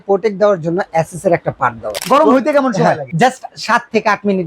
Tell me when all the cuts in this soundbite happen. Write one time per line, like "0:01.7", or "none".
0:01.9
0:03.1